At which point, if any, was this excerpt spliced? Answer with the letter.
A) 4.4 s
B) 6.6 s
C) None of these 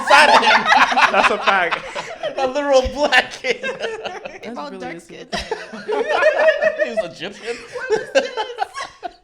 A